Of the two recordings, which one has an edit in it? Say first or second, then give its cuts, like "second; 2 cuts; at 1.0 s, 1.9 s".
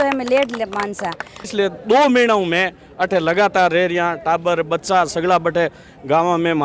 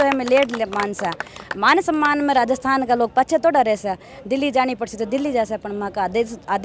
first; 1 cut; at 1.4 s